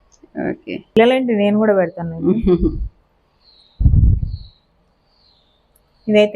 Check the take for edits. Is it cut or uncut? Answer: cut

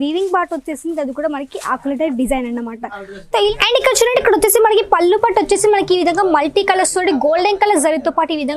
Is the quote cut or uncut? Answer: cut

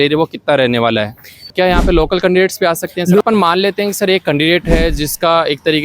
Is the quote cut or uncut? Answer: cut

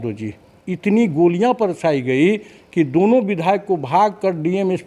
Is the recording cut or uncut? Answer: uncut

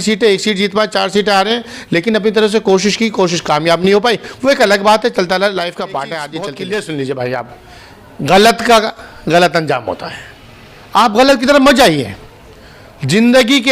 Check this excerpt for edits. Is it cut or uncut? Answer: cut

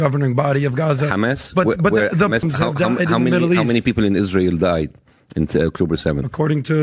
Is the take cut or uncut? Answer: cut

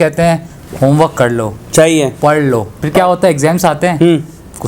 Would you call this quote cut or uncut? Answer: cut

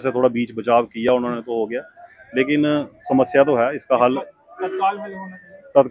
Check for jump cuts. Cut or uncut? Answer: uncut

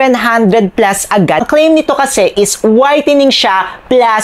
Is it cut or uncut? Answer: cut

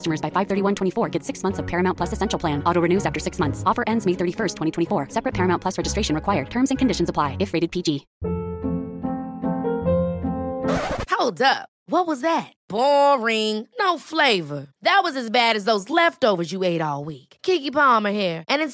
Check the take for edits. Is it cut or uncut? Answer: cut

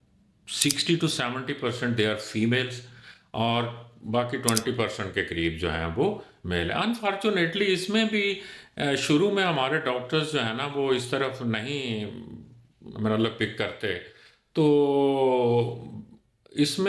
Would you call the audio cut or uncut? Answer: uncut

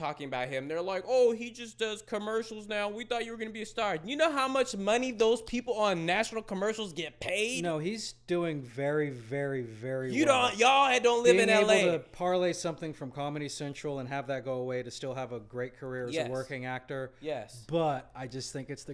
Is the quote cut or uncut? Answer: uncut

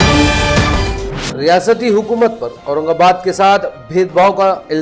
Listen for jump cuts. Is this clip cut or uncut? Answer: cut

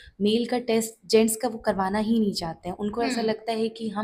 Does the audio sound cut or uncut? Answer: uncut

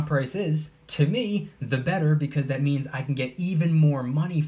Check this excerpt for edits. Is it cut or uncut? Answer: uncut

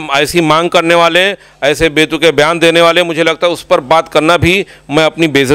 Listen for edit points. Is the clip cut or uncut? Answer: uncut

